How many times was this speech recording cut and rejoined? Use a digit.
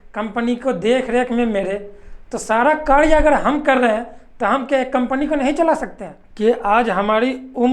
1